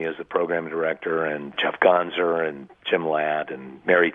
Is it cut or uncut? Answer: cut